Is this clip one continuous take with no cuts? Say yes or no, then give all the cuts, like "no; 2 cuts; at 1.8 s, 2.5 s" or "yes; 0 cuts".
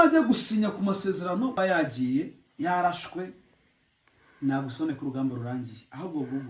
no; 1 cut; at 1.5 s